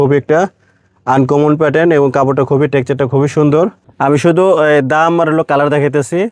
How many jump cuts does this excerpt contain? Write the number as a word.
one